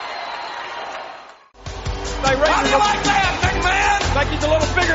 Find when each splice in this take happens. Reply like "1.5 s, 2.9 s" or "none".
1.7 s